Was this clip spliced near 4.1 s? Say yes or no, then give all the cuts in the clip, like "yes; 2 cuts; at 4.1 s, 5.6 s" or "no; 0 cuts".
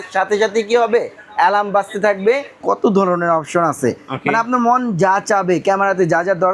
no; 1 cut; at 2.6 s